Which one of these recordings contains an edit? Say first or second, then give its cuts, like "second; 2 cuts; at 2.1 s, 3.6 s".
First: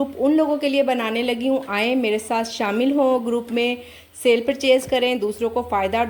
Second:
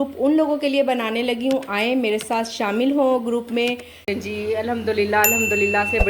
second; 1 cut; at 3.9 s